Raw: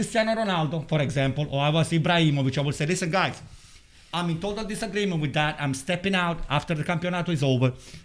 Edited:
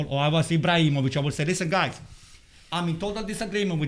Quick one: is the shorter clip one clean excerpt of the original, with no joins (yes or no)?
yes